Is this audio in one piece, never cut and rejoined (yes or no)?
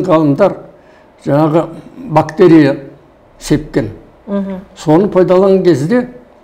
yes